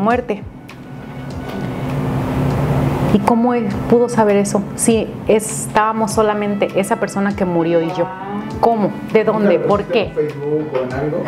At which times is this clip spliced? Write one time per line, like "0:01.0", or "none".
none